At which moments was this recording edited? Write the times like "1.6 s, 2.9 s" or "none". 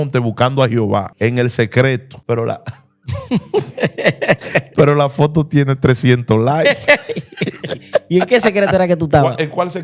1.1 s, 2.1 s